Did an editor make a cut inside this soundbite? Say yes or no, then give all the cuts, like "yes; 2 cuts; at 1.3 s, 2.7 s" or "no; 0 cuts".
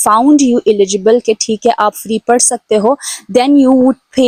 no; 0 cuts